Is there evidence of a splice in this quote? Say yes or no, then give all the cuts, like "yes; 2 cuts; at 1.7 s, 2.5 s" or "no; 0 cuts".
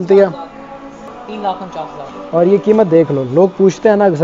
yes; 1 cut; at 1.1 s